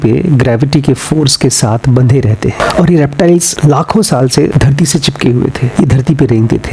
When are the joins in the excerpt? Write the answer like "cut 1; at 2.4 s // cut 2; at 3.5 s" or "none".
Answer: none